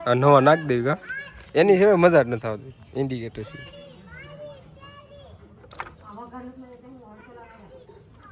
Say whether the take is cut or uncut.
uncut